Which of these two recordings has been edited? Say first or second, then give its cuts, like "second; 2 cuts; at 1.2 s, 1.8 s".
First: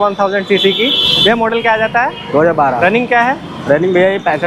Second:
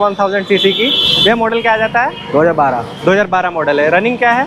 first; 1 cut; at 2.8 s